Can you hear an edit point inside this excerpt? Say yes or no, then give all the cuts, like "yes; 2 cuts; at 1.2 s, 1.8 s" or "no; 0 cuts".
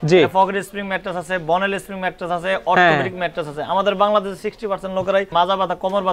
no; 0 cuts